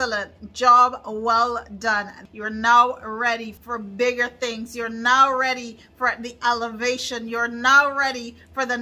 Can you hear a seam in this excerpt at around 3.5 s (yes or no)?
yes